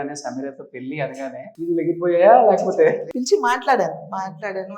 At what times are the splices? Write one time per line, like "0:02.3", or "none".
0:01.5
0:03.1